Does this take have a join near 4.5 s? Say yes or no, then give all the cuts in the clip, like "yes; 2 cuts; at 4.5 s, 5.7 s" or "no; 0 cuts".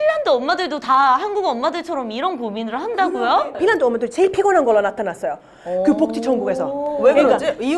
no; 1 cut; at 3.0 s